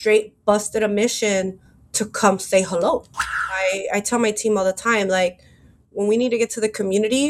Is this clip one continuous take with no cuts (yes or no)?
no